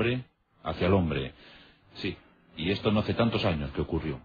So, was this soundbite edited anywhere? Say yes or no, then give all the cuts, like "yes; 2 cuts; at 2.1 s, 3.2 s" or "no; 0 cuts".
yes; 1 cut; at 2.6 s